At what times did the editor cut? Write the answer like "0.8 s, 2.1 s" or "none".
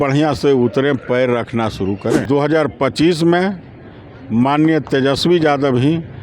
2.2 s